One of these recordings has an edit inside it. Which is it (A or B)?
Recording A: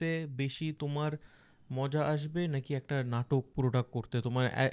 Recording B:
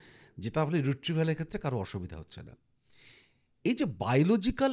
A